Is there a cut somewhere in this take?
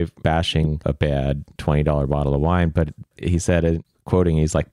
yes; 1 cut; at 3.8 s

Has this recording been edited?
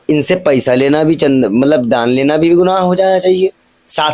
no; 0 cuts

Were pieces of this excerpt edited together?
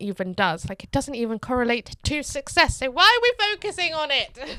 no; 0 cuts

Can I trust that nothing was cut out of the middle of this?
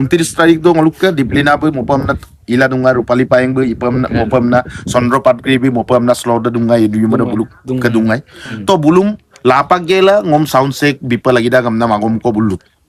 yes; 0 cuts

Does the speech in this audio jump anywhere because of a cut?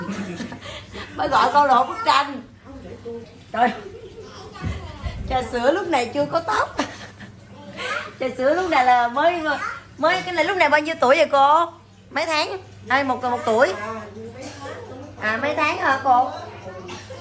yes; 1 cut; at 3.2 s

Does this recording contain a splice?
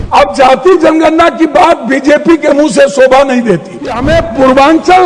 yes; 1 cut; at 4.0 s

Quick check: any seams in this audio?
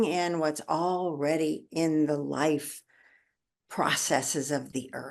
no; 0 cuts

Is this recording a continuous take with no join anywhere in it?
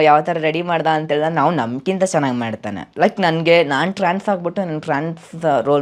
yes; 0 cuts

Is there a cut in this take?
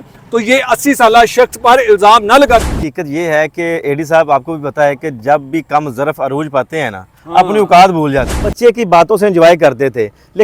yes; 2 cuts; at 2.6 s, 8.4 s

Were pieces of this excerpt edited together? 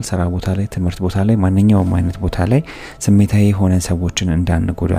no; 0 cuts

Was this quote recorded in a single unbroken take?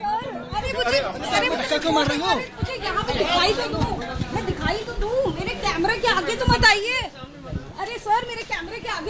yes; 0 cuts

